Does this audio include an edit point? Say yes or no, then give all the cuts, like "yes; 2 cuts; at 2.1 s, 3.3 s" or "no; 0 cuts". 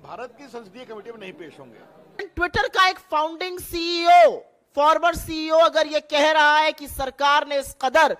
yes; 1 cut; at 2.3 s